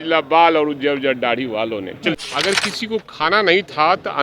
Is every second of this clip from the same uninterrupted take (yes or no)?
no